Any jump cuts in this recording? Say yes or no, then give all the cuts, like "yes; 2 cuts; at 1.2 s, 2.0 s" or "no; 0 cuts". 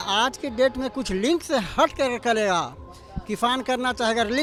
no; 0 cuts